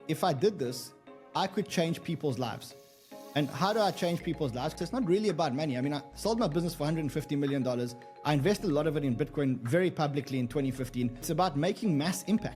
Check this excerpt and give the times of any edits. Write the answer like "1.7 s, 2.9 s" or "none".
4.7 s, 11.3 s